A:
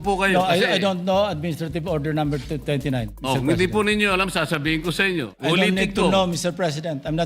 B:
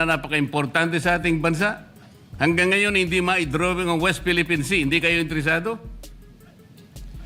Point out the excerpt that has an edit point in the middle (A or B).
A